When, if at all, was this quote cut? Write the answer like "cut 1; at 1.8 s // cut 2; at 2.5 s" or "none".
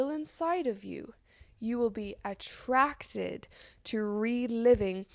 none

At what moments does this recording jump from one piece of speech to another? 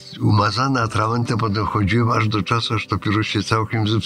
none

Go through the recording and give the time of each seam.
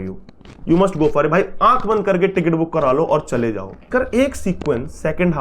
cut 1; at 3.9 s

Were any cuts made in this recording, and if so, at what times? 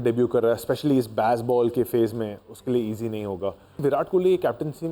cut 1; at 3.8 s

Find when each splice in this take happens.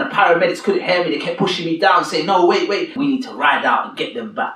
cut 1; at 3.0 s

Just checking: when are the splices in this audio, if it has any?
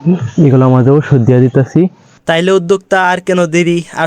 cut 1; at 2.0 s

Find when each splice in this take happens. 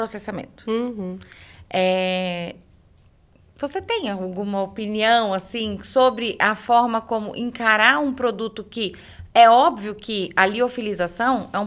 none

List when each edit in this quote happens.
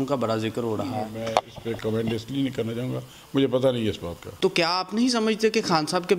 cut 1; at 4.2 s

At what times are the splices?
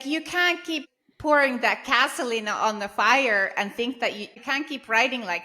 cut 1; at 0.9 s // cut 2; at 4.3 s

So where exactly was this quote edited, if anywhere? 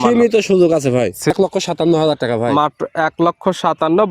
cut 1; at 1.3 s

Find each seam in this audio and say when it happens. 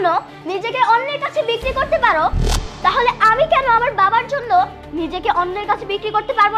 none

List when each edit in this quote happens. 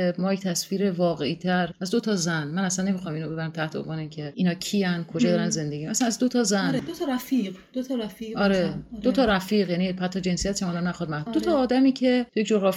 cut 1; at 6.9 s

